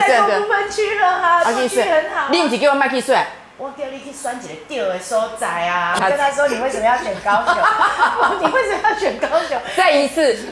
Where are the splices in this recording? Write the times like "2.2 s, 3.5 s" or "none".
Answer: 6.0 s